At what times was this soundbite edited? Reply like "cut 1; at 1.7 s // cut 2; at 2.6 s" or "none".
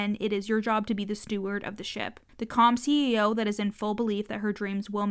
cut 1; at 2.2 s